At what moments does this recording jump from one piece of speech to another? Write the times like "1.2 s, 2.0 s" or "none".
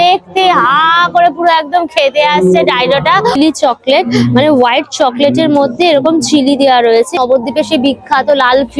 3.4 s, 7.2 s